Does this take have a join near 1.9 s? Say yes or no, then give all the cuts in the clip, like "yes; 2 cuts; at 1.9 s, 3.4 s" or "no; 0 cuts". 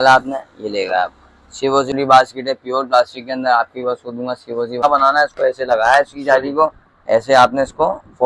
yes; 2 cuts; at 1.9 s, 4.8 s